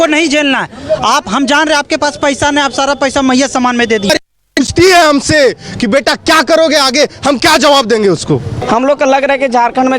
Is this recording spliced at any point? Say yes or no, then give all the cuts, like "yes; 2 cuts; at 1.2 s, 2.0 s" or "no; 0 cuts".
yes; 2 cuts; at 4.1 s, 8.6 s